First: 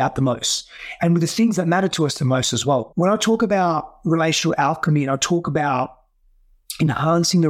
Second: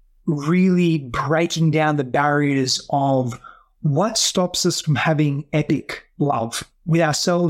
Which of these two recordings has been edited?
first; 1 cut; at 2.9 s

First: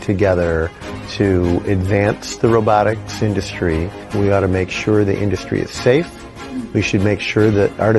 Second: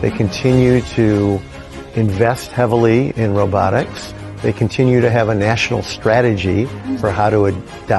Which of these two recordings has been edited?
first; 1 cut; at 4.0 s

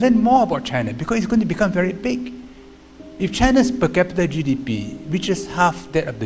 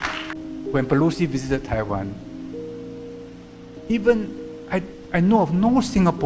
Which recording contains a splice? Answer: second; 3 cuts; at 0.7 s, 2.1 s, 3.8 s

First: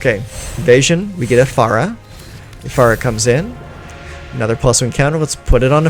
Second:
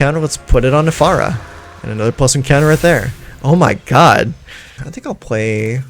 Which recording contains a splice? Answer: second; 1 cut; at 4.8 s

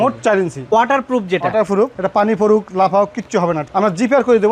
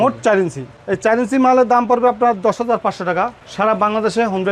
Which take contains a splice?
first; 3 cuts; at 0.7 s, 2.0 s, 3.6 s

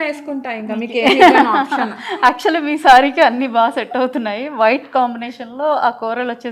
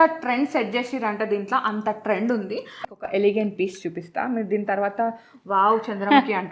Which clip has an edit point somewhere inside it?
second; 1 cut; at 2.9 s

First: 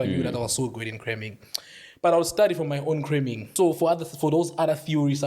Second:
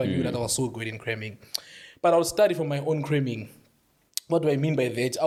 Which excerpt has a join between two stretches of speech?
first; 1 cut; at 3.4 s

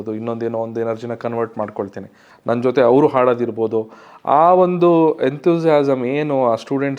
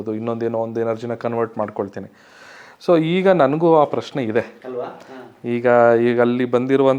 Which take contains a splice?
first; 1 cut; at 2.3 s

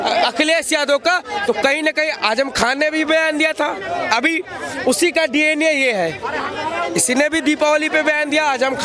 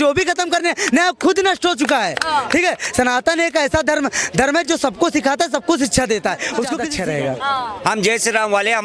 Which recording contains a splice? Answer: second; 1 cut; at 6.8 s

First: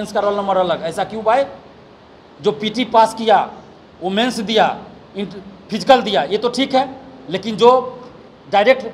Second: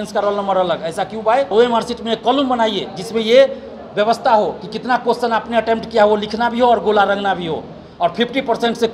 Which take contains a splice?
second; 1 cut; at 1.5 s

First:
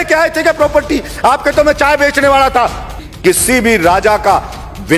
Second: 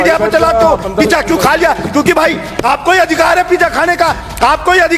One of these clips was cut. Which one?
first; 1 cut; at 3.0 s

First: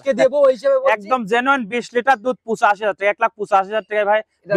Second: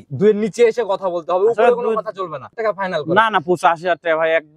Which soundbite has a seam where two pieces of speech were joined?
second; 1 cut; at 2.5 s

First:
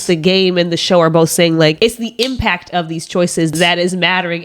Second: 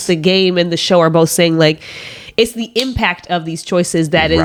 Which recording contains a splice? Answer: first; 2 cuts; at 1.8 s, 3.5 s

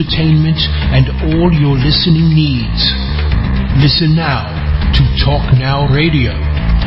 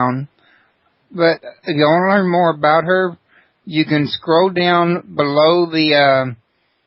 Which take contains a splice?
second; 1 cut; at 2.2 s

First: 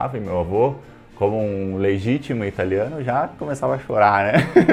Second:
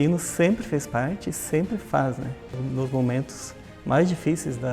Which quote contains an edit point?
second; 1 cut; at 2.5 s

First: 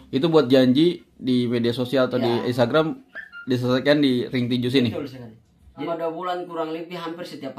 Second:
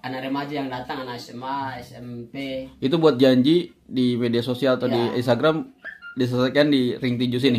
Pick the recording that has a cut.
first; 1 cut; at 5.9 s

